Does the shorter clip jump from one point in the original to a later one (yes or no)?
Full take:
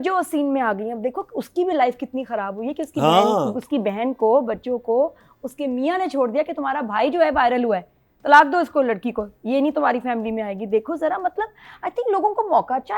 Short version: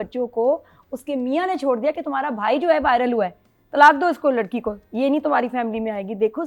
no